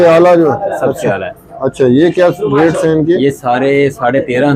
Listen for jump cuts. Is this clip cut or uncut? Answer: uncut